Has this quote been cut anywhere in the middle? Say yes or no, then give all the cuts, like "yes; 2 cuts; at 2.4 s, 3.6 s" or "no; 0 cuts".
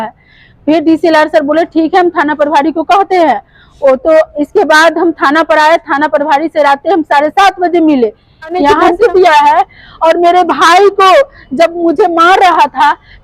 yes; 1 cut; at 8.8 s